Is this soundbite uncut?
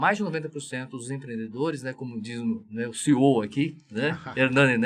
yes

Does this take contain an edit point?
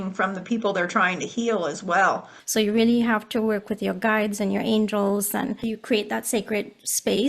yes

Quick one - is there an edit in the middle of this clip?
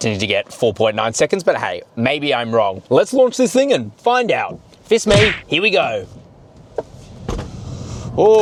no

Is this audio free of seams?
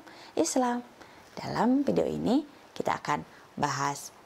yes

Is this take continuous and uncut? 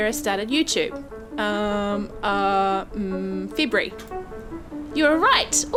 yes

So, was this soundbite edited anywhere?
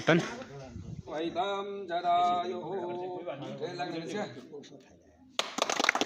yes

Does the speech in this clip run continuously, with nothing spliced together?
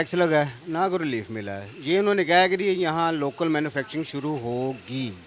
yes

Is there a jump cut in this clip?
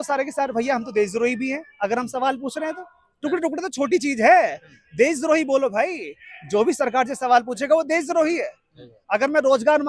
no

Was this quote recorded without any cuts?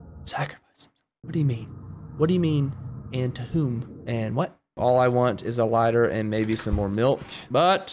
no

